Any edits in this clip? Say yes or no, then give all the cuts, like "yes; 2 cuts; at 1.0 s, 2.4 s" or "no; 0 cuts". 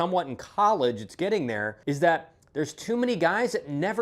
yes; 1 cut; at 1.7 s